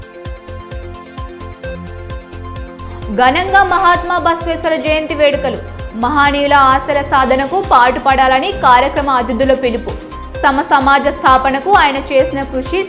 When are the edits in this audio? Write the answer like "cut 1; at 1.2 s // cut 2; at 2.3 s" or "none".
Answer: cut 1; at 1.8 s

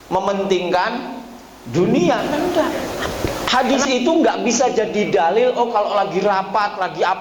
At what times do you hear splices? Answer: cut 1; at 3.0 s

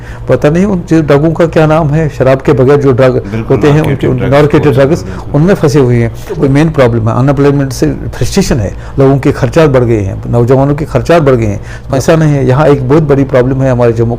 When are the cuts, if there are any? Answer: cut 1; at 6.4 s // cut 2; at 11.9 s

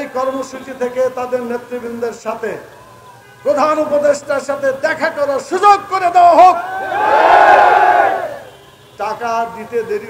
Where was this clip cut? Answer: none

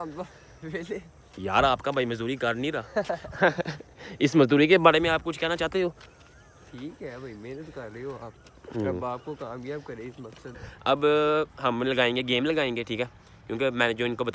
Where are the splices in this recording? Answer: cut 1; at 1.1 s // cut 2; at 10.5 s

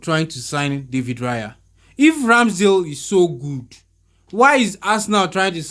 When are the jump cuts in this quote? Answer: none

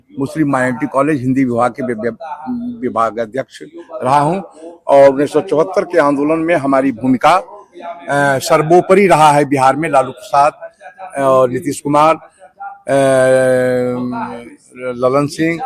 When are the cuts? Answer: none

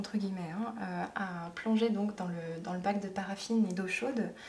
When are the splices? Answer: none

